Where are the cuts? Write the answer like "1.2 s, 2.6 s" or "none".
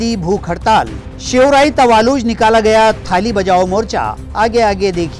none

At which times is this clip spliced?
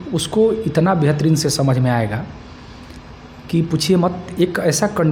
none

